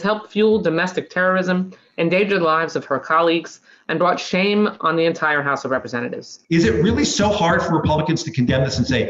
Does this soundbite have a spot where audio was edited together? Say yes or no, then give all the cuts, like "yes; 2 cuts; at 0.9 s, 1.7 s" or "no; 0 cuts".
yes; 1 cut; at 6.3 s